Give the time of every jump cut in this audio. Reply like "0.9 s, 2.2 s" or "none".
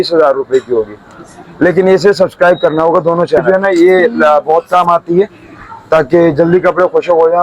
3.4 s